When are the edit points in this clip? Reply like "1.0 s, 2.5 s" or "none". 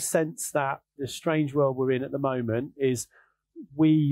1.0 s